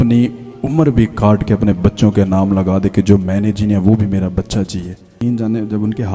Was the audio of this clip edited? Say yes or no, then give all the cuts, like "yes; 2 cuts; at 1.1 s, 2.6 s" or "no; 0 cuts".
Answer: yes; 1 cut; at 5.1 s